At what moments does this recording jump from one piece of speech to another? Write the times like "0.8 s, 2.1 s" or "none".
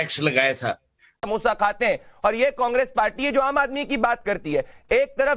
1.2 s